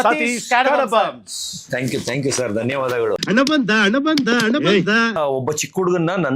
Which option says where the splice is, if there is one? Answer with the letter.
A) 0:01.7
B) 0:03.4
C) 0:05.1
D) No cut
C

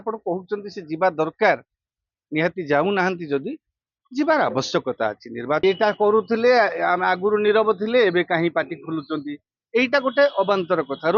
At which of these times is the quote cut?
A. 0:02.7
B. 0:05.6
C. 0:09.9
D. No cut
B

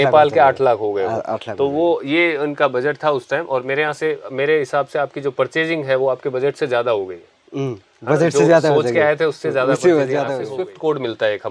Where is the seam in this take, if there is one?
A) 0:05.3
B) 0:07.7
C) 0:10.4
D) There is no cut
C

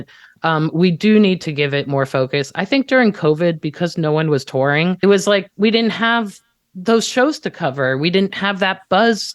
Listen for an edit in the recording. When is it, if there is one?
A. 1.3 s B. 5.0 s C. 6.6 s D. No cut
B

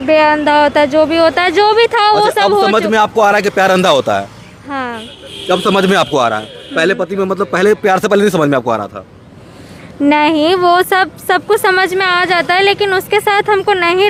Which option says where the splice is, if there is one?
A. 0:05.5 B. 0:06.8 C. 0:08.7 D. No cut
D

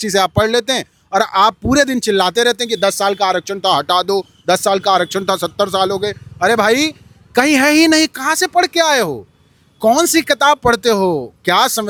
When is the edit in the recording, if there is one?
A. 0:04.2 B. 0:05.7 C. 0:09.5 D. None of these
D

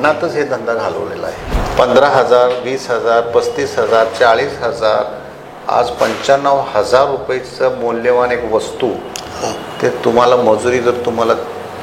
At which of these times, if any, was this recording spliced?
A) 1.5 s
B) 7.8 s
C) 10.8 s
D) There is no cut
A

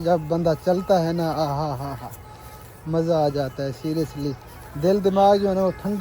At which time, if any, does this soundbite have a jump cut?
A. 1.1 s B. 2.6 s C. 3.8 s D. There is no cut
D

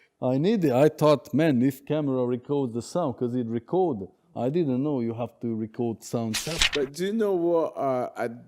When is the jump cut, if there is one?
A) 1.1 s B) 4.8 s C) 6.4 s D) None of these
C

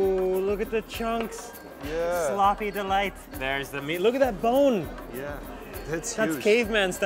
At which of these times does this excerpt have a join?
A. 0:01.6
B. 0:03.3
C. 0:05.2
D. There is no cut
B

